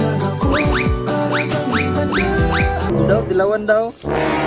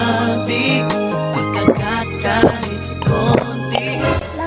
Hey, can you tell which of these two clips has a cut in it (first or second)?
first